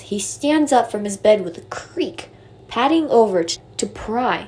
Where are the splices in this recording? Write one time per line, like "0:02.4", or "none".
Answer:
0:03.6